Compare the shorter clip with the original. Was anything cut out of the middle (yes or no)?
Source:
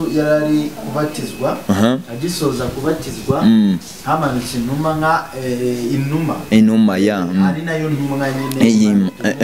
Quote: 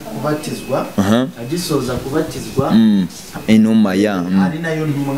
yes